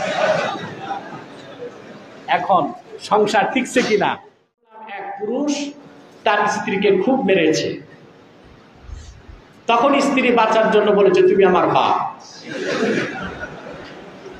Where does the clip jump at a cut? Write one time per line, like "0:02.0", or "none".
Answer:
0:04.7